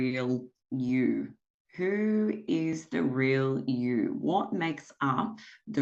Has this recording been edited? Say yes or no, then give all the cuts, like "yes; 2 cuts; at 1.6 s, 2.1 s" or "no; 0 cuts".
no; 0 cuts